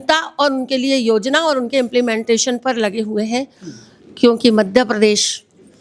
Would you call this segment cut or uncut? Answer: uncut